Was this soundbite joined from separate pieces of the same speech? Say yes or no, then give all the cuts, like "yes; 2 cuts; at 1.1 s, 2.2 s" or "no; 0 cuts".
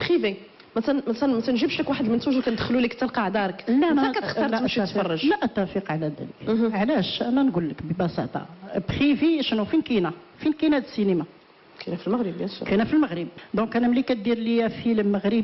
no; 0 cuts